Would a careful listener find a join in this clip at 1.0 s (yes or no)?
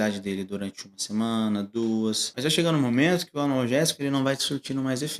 no